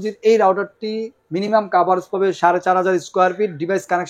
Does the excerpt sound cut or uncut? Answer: uncut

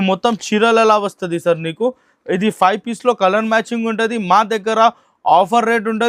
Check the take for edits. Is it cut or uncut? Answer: uncut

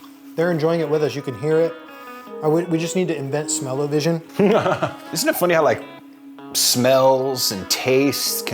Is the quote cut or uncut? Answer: cut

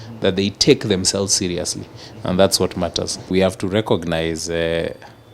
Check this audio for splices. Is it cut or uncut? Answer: cut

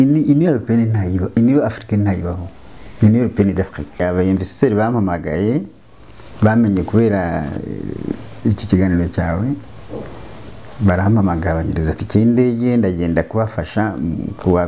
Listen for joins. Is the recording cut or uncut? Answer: cut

